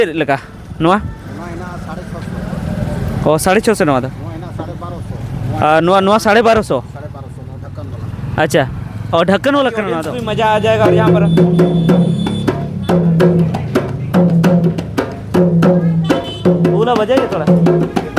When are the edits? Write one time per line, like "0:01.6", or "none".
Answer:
0:10.2

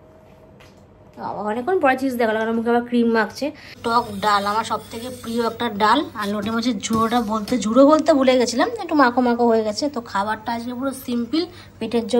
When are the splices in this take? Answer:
0:03.7

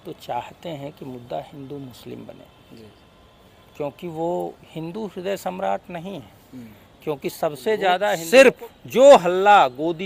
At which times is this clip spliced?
0:08.2

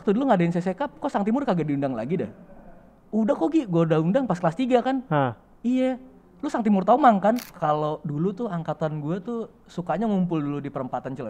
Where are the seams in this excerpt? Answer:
0:07.5

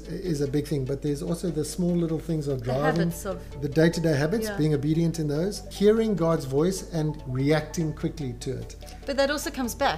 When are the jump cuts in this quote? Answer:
0:03.6
0:05.7
0:07.2

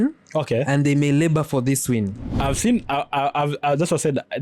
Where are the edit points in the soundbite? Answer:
0:02.2

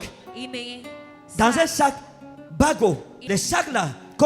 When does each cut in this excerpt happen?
0:03.1

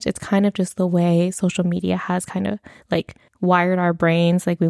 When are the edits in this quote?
0:03.2

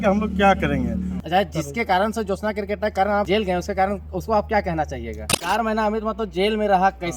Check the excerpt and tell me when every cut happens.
0:01.2
0:03.3
0:05.4

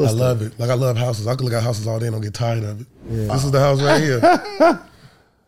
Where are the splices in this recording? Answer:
0:03.3

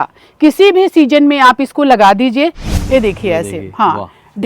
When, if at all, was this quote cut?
0:02.6

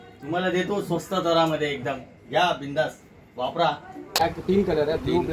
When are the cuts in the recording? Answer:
0:04.2

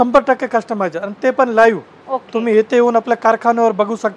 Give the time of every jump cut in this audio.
none

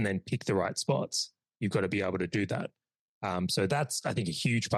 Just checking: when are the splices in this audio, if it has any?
none

